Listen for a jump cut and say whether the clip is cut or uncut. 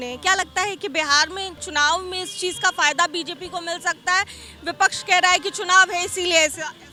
uncut